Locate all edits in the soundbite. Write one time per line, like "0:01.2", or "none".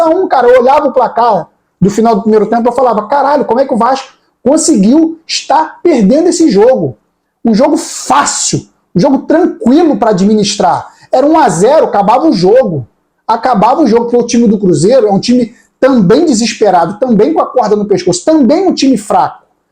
none